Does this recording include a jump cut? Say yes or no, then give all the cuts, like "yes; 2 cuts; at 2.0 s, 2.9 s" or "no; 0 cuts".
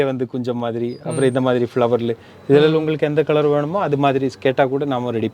no; 0 cuts